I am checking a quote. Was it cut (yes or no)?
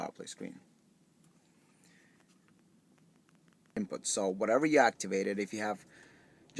yes